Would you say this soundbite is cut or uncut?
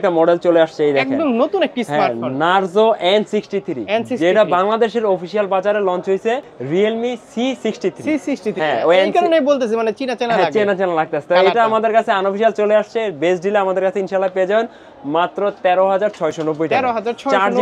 uncut